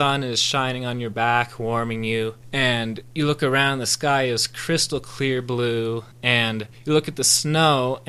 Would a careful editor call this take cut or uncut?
uncut